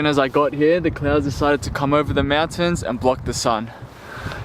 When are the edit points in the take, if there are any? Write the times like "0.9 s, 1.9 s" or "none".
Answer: none

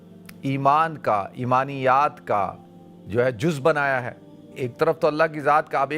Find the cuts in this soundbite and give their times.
4.5 s

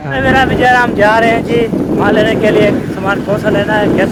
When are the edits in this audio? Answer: none

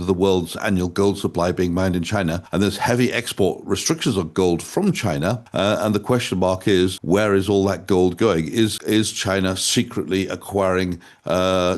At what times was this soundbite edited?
2.4 s, 5.4 s, 7.0 s, 8.8 s

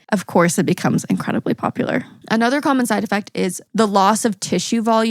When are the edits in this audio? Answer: 2.1 s, 3.6 s

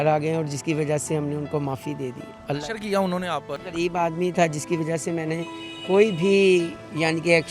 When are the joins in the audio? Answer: 3.6 s

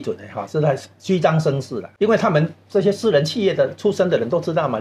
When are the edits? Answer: 1.8 s

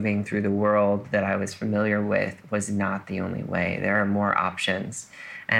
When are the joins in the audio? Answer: none

